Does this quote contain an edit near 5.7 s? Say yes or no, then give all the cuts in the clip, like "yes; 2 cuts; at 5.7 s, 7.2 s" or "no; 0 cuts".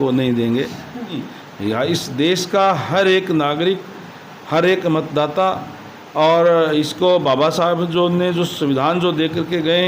no; 1 cut; at 1.3 s